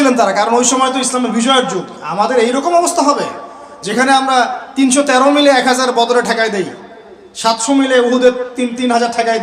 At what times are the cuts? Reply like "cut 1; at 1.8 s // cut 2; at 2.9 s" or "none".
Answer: none